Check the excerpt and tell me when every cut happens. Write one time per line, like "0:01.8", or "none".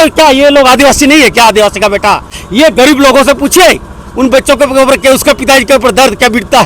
0:02.4